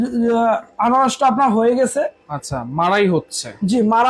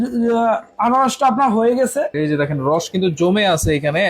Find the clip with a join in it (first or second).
second